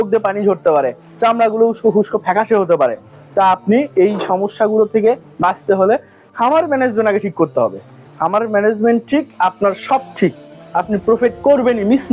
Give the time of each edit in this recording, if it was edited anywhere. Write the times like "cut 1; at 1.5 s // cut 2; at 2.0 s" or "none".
none